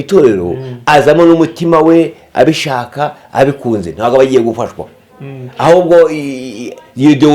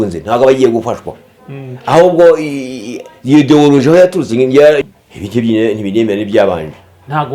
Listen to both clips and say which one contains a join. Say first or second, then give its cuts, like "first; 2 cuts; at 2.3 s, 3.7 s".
second; 1 cut; at 4.8 s